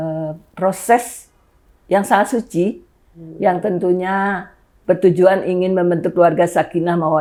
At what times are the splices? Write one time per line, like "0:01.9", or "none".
none